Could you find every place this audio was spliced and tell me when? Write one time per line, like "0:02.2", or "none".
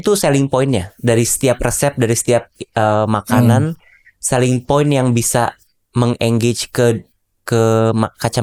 none